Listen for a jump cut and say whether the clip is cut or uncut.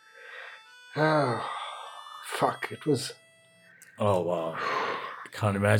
uncut